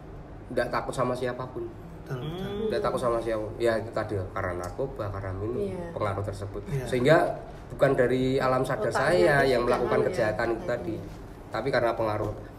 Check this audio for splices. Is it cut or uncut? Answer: uncut